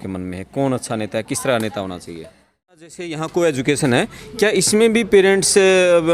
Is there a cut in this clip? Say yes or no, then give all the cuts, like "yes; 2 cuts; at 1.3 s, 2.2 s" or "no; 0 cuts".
yes; 1 cut; at 3.0 s